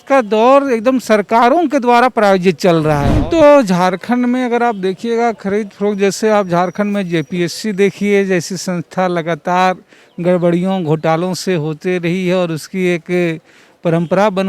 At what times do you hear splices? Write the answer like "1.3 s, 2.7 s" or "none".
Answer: 3.2 s